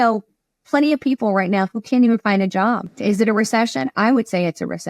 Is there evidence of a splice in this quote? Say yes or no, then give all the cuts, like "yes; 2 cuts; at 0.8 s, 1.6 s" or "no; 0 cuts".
yes; 1 cut; at 2.9 s